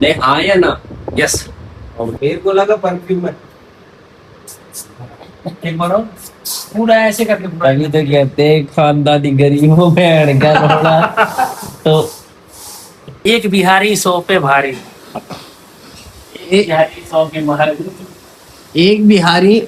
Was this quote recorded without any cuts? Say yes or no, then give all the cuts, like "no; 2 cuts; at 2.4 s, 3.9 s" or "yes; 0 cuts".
no; 2 cuts; at 2.1 s, 13.2 s